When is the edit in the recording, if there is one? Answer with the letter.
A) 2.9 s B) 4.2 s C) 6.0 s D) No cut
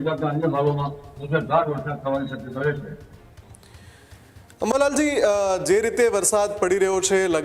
D